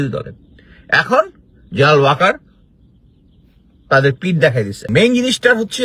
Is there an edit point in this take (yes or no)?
yes